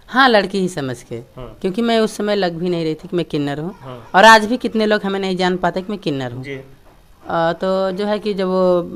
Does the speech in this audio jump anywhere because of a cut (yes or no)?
no